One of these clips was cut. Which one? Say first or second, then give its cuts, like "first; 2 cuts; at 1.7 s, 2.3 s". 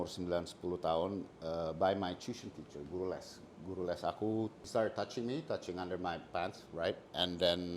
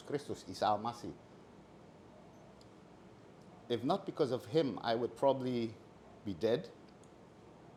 first; 1 cut; at 4.6 s